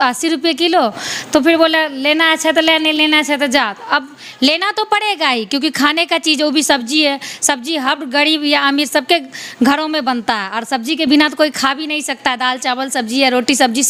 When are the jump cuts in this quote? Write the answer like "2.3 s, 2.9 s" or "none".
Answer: none